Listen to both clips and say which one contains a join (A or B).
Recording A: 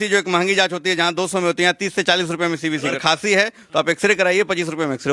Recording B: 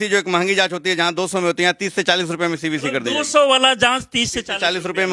A